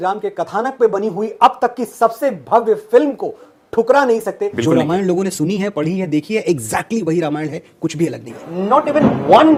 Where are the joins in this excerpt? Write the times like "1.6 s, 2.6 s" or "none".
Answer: none